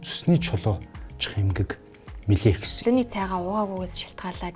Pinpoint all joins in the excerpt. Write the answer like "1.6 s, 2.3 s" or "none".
2.7 s

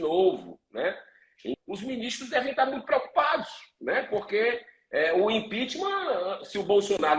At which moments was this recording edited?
1.6 s

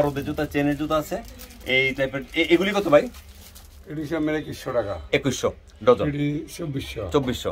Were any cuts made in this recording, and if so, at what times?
none

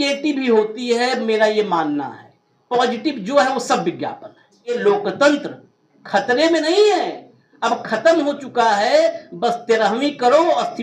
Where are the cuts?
4.8 s

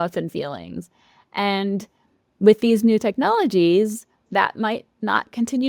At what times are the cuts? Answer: 4.3 s

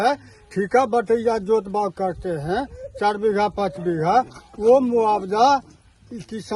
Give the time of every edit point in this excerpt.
none

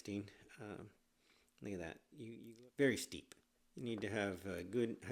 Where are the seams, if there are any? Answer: 2.4 s

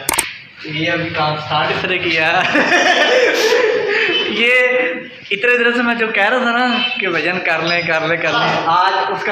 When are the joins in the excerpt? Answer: none

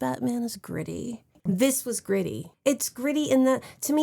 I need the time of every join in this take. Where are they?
1.4 s, 2.4 s

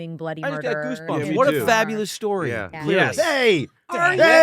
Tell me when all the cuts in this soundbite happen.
2.7 s

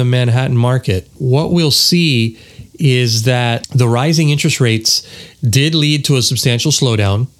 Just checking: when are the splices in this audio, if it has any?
1.2 s, 3.7 s

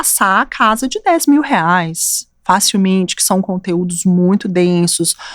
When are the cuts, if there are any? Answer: none

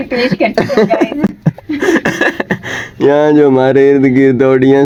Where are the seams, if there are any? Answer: none

